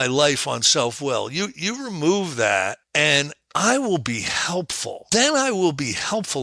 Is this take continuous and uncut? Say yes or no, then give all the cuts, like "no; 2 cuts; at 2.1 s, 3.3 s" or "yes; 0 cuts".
no; 2 cuts; at 2.8 s, 5.0 s